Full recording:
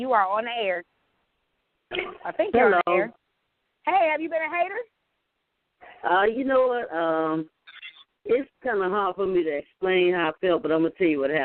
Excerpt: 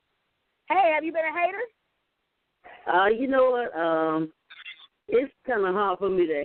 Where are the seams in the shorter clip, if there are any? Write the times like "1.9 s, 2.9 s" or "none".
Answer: none